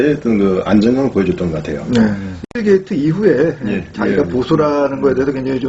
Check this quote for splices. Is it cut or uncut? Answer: cut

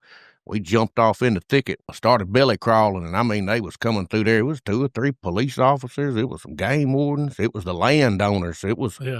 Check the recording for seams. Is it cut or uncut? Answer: cut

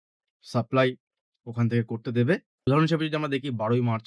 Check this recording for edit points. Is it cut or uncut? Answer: cut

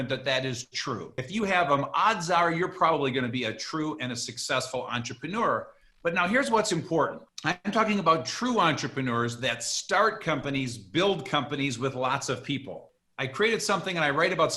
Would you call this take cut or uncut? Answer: cut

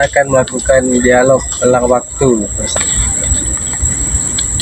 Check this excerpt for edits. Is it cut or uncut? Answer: cut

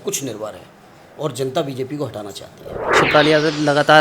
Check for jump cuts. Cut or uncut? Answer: cut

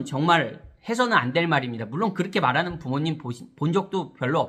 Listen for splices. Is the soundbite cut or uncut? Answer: uncut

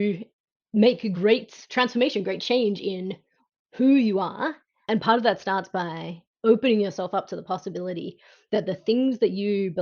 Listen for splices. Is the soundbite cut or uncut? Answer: cut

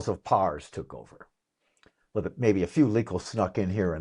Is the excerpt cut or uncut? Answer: uncut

